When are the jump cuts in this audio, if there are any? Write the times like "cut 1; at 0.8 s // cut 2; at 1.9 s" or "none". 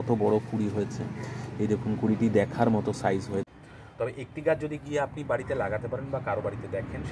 cut 1; at 3.6 s